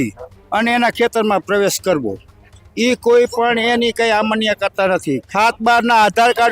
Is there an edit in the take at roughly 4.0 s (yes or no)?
no